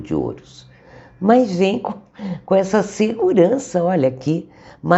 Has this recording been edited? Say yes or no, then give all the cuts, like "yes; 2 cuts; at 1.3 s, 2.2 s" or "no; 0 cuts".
no; 0 cuts